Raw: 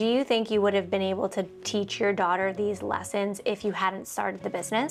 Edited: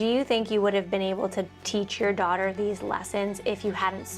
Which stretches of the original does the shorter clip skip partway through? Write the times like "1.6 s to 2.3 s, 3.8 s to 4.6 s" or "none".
none